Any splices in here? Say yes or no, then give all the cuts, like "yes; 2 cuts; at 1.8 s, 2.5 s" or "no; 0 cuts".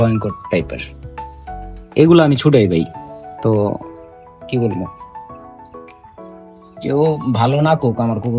no; 0 cuts